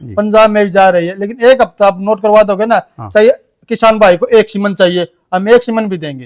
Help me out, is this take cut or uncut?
uncut